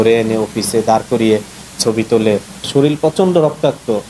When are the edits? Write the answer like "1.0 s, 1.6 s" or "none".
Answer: 2.6 s